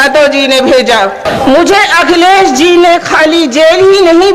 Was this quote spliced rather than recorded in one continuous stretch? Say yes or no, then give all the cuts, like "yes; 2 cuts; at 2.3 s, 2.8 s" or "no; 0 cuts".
yes; 1 cut; at 1.2 s